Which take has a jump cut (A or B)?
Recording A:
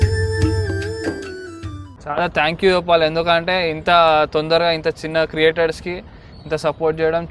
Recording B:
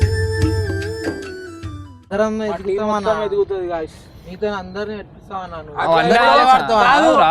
A